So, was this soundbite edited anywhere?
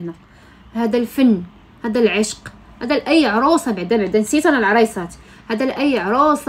no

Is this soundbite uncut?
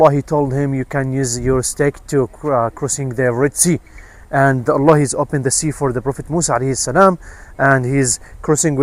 yes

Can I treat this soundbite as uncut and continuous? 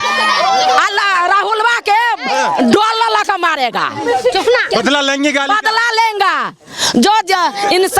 yes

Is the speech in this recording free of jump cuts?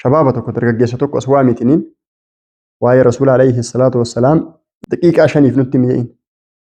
no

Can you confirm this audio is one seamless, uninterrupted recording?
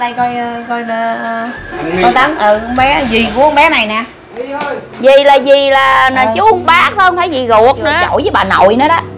no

